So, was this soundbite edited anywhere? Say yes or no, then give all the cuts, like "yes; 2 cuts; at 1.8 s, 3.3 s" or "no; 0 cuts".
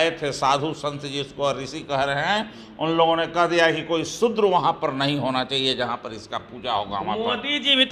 no; 0 cuts